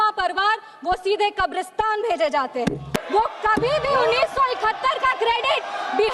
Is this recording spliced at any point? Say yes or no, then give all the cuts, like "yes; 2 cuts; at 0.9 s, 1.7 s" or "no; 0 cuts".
yes; 1 cut; at 2.9 s